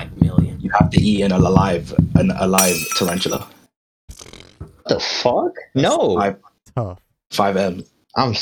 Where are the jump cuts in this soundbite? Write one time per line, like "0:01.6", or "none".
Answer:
none